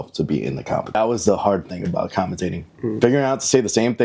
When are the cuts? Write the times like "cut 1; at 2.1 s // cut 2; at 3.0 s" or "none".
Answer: cut 1; at 1.0 s